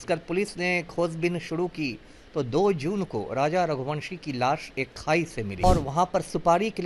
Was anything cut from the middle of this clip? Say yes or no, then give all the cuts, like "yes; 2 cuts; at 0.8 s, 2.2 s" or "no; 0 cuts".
yes; 1 cut; at 5.6 s